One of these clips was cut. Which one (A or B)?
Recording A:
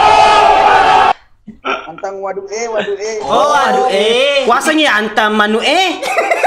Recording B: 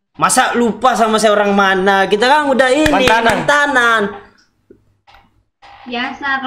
A